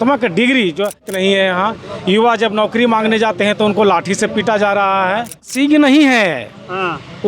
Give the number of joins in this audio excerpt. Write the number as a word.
two